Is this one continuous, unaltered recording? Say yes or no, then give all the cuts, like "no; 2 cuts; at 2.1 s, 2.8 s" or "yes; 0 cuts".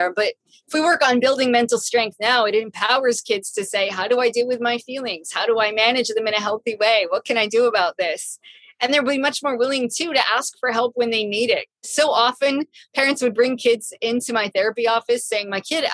no; 1 cut; at 11.7 s